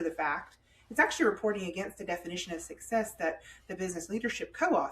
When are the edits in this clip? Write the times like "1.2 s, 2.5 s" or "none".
none